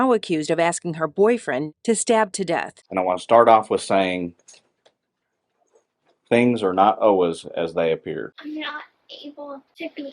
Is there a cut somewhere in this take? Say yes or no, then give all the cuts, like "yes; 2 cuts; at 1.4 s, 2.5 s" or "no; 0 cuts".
yes; 3 cuts; at 1.7 s, 2.8 s, 8.3 s